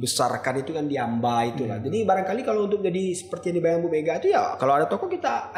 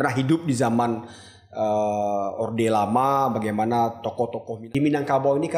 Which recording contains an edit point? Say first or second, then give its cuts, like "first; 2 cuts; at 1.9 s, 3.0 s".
second; 1 cut; at 4.5 s